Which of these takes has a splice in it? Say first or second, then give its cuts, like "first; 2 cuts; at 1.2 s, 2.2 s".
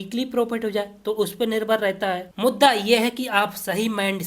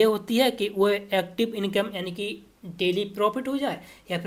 first; 1 cut; at 2.3 s